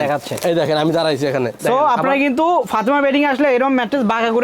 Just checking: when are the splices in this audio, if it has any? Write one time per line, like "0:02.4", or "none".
0:01.5